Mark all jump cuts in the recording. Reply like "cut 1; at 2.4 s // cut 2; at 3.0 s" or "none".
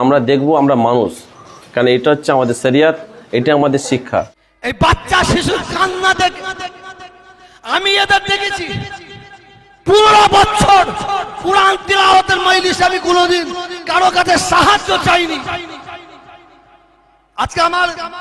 cut 1; at 4.4 s